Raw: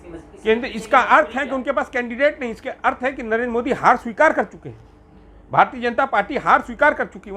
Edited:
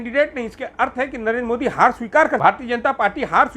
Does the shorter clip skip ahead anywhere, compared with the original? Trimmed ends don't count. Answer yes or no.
yes